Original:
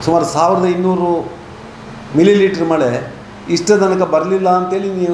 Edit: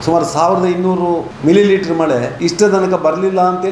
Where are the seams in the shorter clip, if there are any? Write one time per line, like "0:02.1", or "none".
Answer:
0:01.3
0:02.3

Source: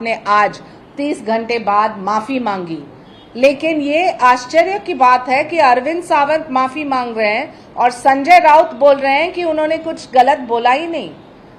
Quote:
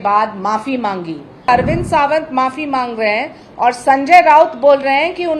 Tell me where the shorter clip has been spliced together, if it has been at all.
0:01.5

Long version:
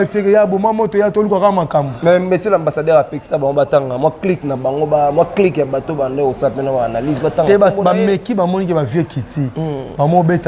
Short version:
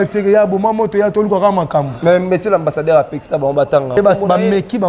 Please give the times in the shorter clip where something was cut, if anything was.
0:04.0

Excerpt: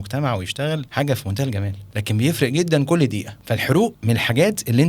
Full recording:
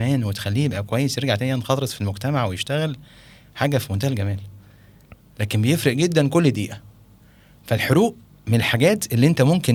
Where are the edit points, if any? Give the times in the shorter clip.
0:00.9
0:01.8
0:03.3
0:04.0

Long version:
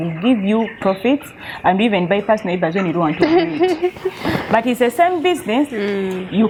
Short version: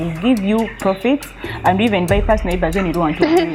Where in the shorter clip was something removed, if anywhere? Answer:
none

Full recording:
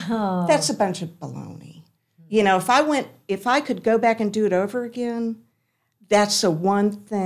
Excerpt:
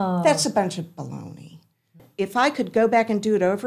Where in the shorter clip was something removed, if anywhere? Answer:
0:02.0

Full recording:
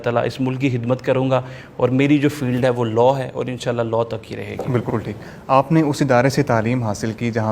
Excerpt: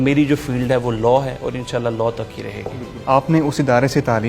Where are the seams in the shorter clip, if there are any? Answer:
0:02.7

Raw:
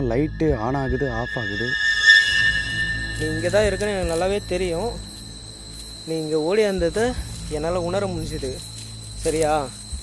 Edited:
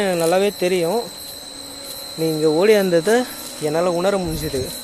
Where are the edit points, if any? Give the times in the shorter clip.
none

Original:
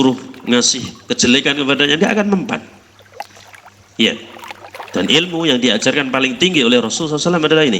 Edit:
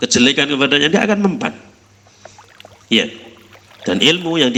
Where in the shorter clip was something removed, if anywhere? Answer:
none

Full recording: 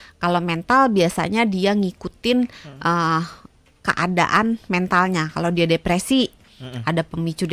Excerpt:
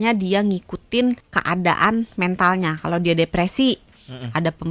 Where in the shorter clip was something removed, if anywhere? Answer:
0:01.3

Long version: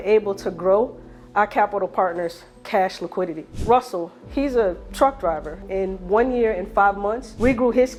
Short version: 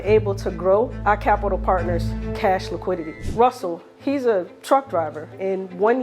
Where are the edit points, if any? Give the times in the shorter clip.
0:01.0

